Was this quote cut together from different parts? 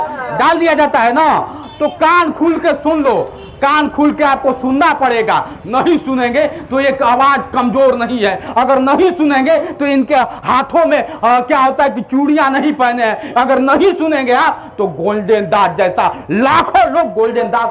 no; 0 cuts

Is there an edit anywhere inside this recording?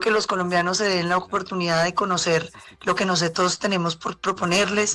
no; 0 cuts

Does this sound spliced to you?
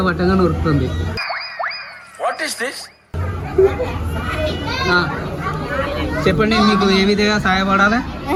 no; 0 cuts

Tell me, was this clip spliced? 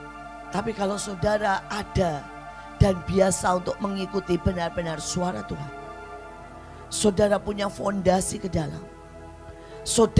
no; 0 cuts

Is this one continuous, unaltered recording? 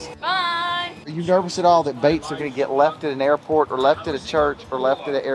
no; 1 cut; at 1.1 s

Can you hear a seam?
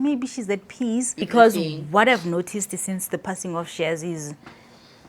yes; 1 cut; at 1.2 s

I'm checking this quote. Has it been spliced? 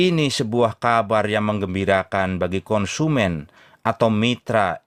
no; 0 cuts

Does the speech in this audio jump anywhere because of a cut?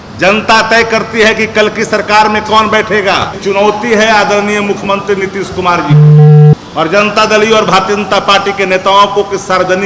yes; 2 cuts; at 3.4 s, 6.5 s

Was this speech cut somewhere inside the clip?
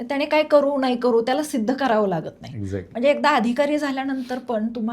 no; 0 cuts

